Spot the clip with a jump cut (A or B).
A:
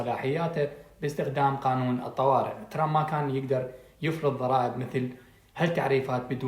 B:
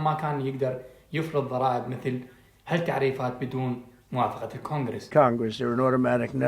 B